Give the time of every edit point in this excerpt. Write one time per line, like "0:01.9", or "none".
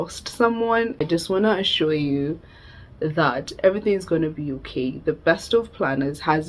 0:01.0